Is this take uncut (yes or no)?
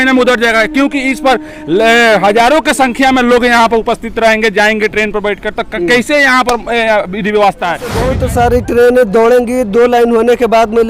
no